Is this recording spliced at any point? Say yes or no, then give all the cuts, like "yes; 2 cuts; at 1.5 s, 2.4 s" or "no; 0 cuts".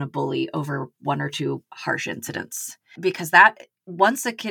yes; 1 cut; at 3.0 s